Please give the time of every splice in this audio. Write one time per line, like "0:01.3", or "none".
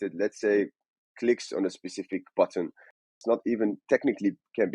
0:03.1